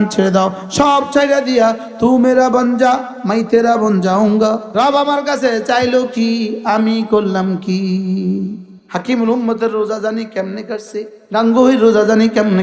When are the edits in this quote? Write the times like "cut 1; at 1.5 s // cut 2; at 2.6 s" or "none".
cut 1; at 4.7 s